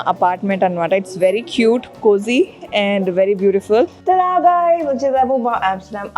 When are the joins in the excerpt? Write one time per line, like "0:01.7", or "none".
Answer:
0:04.0